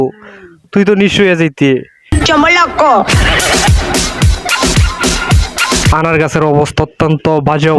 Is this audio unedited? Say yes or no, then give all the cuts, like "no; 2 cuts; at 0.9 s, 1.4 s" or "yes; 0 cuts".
no; 2 cuts; at 2.2 s, 5.9 s